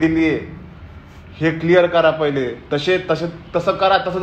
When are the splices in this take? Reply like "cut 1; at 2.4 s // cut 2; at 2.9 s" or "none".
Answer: none